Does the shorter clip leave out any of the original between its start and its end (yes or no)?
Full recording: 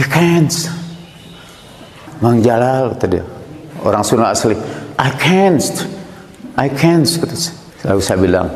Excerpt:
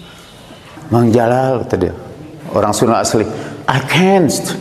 no